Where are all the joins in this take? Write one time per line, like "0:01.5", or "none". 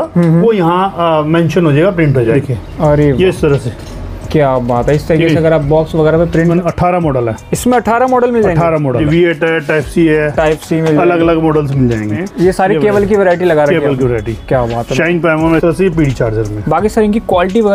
0:02.3
0:06.5
0:09.0
0:12.2
0:15.6